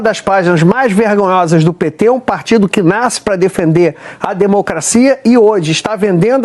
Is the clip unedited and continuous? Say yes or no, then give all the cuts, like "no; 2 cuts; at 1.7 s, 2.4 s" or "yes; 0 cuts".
yes; 0 cuts